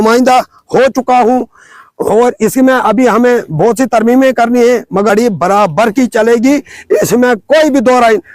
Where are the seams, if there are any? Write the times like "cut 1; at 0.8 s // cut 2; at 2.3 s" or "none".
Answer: cut 1; at 5.1 s